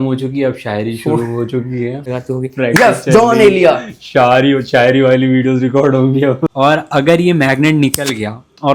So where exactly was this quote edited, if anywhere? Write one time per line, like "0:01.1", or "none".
0:02.0
0:06.5